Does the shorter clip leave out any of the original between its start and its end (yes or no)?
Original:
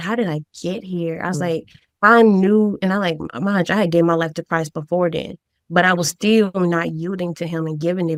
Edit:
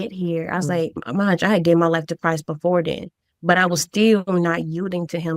yes